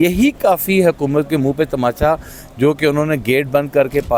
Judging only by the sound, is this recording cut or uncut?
uncut